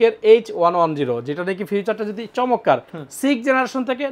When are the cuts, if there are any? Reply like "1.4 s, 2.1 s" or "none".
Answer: none